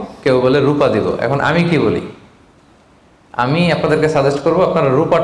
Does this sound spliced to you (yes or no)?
no